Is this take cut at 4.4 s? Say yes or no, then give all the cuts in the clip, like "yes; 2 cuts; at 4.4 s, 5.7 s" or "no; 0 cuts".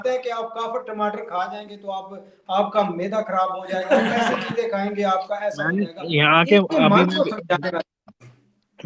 no; 0 cuts